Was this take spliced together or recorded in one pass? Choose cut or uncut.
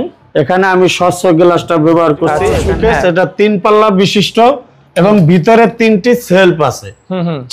cut